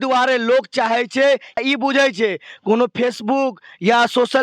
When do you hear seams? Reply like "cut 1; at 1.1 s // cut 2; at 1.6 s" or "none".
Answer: cut 1; at 1.6 s

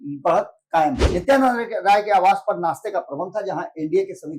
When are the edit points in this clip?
cut 1; at 1.1 s

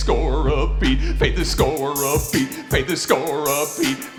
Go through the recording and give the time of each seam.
none

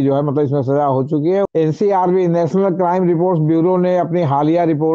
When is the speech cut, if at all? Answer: cut 1; at 1.5 s

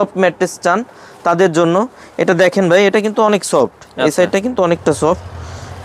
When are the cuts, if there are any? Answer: none

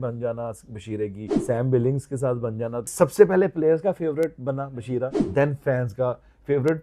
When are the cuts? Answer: cut 1; at 1.3 s // cut 2; at 2.9 s // cut 3; at 5.2 s

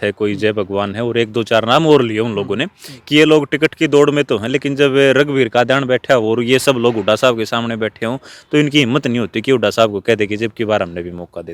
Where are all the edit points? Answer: none

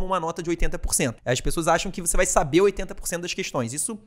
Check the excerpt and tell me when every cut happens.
cut 1; at 1.2 s

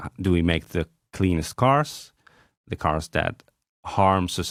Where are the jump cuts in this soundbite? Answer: none

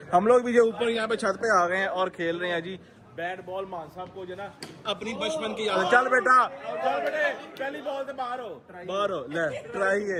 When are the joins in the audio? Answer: none

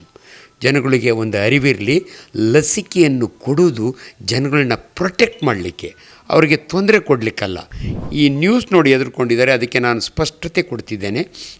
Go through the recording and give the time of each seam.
cut 1; at 7.9 s

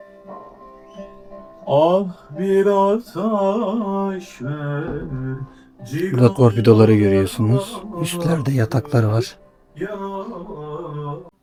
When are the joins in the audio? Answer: none

